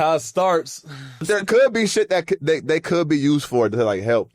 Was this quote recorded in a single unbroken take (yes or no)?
no